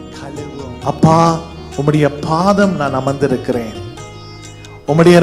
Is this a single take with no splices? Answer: no; 1 cut; at 1.0 s

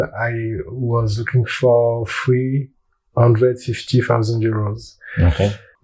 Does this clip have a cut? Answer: no; 0 cuts

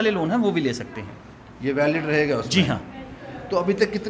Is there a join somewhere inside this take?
no; 0 cuts

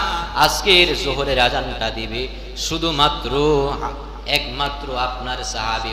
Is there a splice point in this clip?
no; 0 cuts

